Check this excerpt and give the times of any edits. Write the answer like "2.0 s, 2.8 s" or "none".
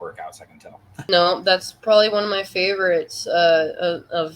1.0 s